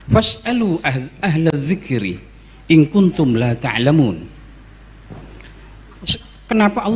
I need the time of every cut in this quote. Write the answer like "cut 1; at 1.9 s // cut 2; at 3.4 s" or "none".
none